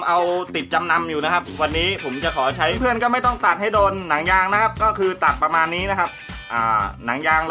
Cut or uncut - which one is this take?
cut